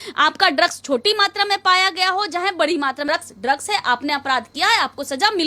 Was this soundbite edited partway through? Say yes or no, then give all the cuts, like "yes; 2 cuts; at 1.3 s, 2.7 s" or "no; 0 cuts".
yes; 1 cut; at 3.1 s